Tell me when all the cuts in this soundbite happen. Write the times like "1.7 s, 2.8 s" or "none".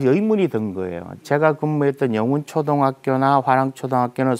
none